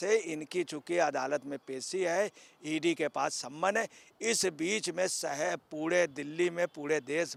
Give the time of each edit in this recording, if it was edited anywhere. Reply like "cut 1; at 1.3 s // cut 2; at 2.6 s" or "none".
none